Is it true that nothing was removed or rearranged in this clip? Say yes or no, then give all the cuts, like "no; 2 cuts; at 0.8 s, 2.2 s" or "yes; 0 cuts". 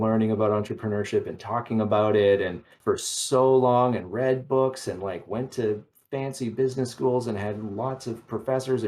no; 1 cut; at 2.7 s